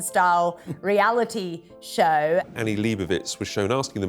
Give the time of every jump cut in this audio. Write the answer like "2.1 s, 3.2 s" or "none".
2.5 s